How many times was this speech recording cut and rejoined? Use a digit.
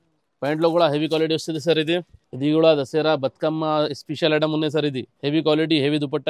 2